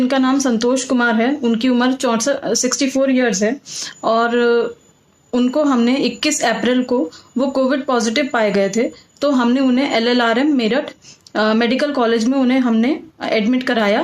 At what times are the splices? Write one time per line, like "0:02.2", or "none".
none

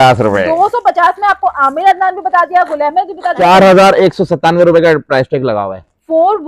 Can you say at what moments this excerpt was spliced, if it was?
0:03.4

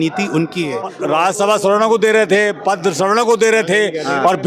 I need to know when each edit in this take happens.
0:00.9

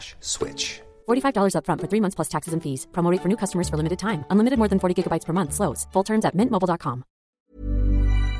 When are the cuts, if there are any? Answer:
0:07.4

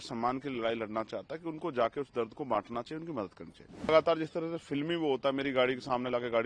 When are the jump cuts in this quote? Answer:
0:03.9

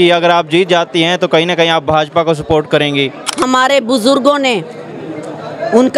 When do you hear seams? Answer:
0:03.2

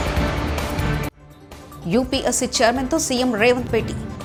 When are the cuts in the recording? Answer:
none

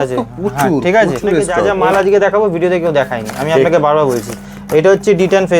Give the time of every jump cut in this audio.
0:01.6

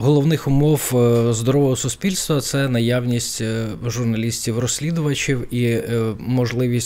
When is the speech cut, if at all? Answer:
none

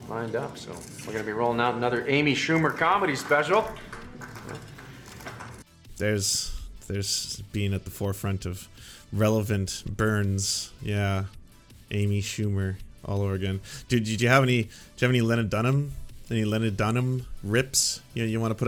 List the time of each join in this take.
none

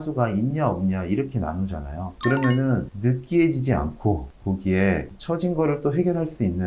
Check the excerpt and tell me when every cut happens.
0:02.1

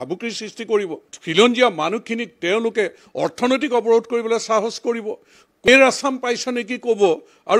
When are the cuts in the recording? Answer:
0:05.7

